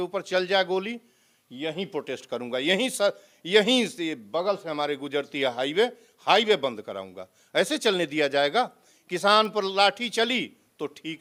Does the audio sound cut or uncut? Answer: uncut